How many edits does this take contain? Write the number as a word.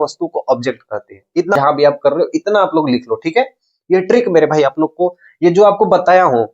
one